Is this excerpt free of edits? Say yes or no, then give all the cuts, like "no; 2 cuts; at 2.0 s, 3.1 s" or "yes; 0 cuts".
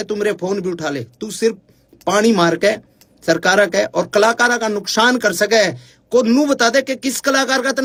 yes; 0 cuts